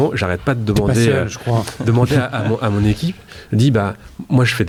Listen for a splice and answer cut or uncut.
uncut